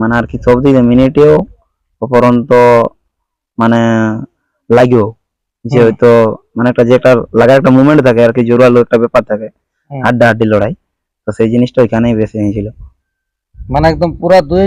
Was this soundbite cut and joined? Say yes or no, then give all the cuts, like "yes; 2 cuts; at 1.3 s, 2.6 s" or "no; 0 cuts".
no; 0 cuts